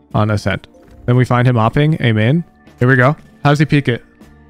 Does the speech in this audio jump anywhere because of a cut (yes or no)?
yes